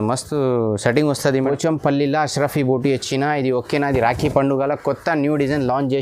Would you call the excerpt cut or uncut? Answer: cut